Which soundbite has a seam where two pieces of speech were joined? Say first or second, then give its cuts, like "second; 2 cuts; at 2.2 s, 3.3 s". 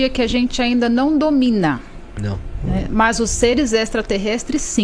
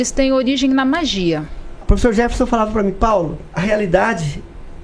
second; 2 cuts; at 1.8 s, 3.4 s